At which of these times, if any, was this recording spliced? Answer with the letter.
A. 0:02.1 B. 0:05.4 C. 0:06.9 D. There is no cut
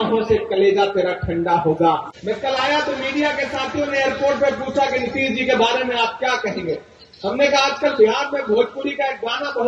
A